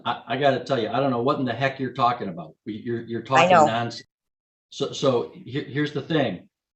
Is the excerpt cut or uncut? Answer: uncut